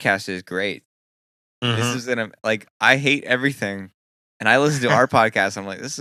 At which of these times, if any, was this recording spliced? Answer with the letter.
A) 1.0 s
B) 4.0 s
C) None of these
C